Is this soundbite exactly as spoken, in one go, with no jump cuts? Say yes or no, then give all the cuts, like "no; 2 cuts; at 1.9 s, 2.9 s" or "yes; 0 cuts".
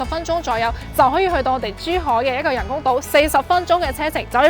yes; 0 cuts